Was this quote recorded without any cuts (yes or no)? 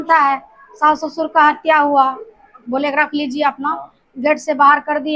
no